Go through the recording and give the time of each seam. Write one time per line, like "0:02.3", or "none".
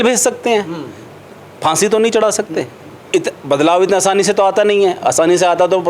0:03.0